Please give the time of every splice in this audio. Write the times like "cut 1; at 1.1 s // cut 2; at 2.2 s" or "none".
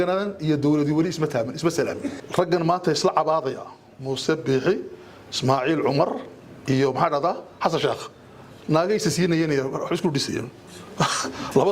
cut 1; at 2.2 s